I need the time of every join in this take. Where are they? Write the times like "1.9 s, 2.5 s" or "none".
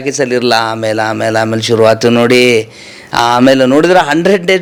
none